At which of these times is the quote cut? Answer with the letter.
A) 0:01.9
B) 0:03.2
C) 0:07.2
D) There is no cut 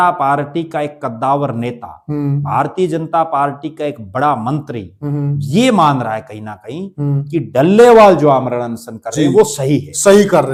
D